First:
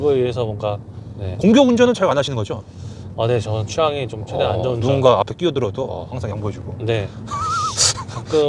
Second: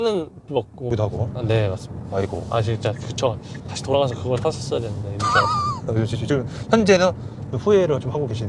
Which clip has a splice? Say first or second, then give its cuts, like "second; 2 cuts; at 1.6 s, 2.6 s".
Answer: second; 1 cut; at 0.9 s